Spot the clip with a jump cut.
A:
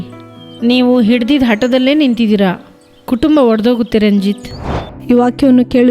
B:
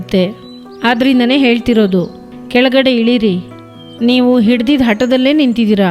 A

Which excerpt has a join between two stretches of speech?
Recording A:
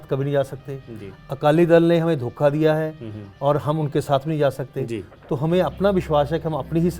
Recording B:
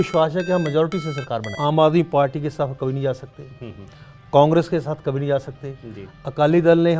B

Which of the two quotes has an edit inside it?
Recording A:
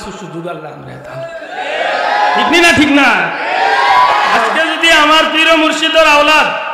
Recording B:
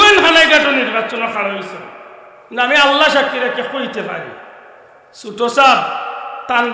A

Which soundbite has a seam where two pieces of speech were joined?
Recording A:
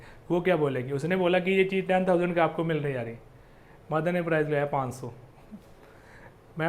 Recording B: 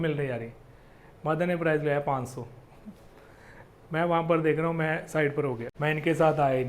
B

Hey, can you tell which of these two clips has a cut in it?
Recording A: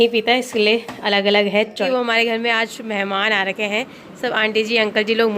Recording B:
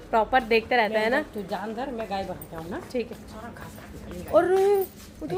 A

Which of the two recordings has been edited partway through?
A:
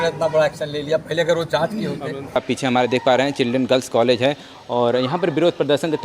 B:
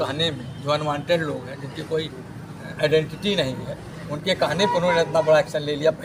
A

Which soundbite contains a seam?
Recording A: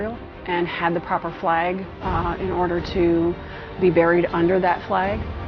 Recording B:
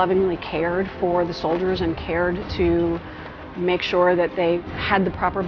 B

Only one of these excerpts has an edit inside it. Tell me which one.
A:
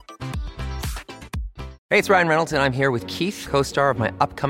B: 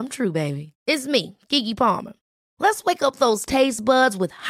A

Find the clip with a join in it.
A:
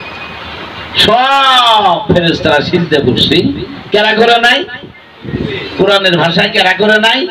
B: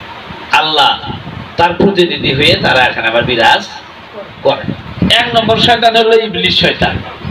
B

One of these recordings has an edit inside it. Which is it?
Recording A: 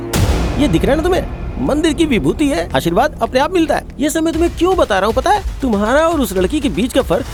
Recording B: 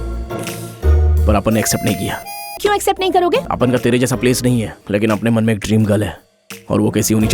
B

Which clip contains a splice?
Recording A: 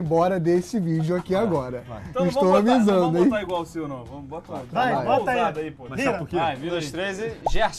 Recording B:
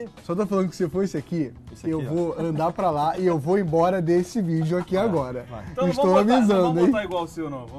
A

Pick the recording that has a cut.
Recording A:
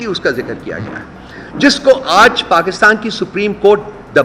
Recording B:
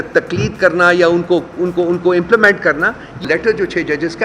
B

